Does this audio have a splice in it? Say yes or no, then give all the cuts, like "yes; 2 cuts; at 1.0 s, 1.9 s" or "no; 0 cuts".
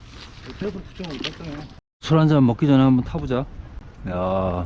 yes; 1 cut; at 1.9 s